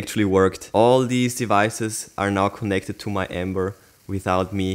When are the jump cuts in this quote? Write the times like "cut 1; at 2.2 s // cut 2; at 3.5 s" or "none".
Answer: none